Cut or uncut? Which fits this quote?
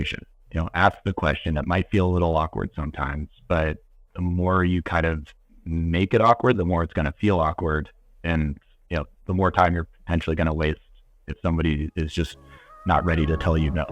uncut